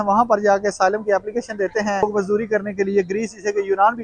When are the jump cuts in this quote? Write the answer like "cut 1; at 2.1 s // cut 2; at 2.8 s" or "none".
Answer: cut 1; at 2.1 s